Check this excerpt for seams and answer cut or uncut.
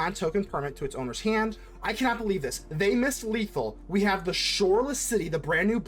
cut